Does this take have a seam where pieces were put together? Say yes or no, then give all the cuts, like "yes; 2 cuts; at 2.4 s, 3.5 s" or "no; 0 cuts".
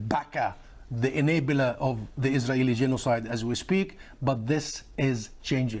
no; 0 cuts